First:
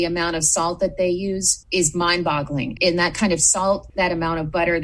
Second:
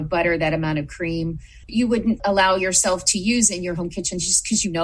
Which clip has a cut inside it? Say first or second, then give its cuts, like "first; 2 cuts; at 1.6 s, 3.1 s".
second; 1 cut; at 2.2 s